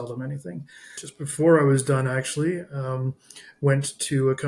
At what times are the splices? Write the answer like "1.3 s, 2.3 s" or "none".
1.0 s